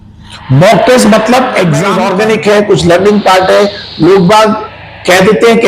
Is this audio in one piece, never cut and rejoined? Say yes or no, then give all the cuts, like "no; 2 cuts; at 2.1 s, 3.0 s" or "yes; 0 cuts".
no; 1 cut; at 1.9 s